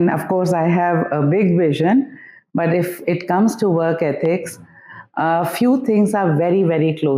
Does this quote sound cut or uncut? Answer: uncut